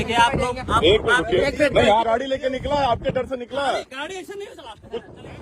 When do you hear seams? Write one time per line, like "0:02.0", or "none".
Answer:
0:02.1